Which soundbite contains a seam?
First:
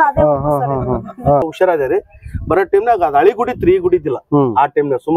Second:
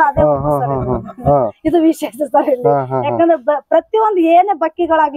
first; 1 cut; at 1.4 s

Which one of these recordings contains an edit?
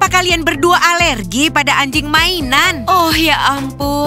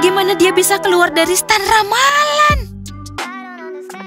second; 1 cut; at 2.6 s

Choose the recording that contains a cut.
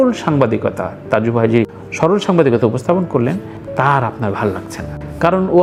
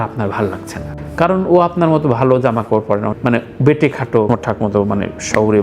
second; 2 cuts; at 3.2 s, 4.3 s

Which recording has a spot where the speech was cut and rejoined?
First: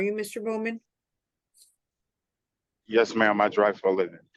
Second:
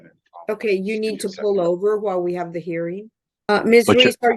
second; 1 cut; at 3.5 s

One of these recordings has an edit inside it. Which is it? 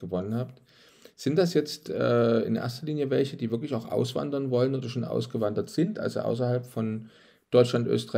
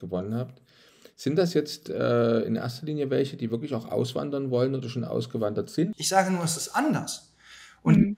second; 1 cut; at 6.0 s

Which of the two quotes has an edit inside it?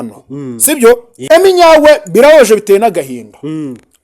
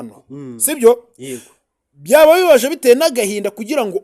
first; 1 cut; at 1.1 s

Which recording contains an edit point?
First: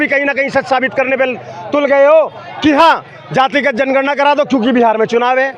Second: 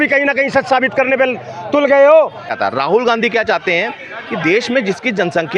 second; 1 cut; at 2.5 s

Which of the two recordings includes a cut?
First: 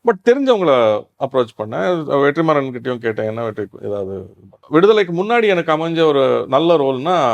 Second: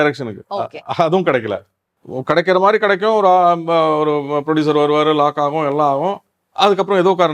first; 1 cut; at 4.5 s

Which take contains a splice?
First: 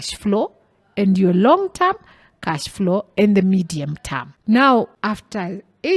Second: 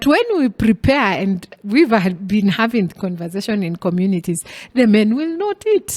first; 2 cuts; at 4.3 s, 4.9 s

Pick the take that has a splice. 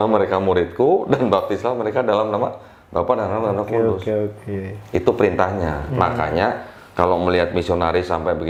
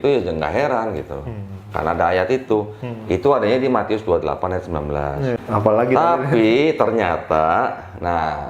second; 1 cut; at 5.4 s

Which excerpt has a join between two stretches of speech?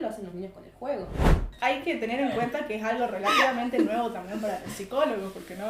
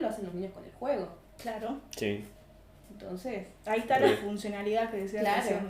first; 1 cut; at 1.4 s

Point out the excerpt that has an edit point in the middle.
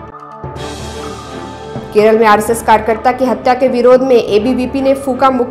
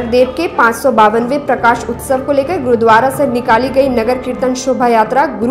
first; 1 cut; at 1.4 s

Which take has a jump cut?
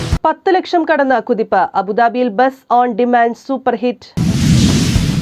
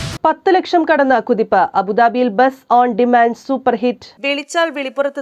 first; 1 cut; at 4.1 s

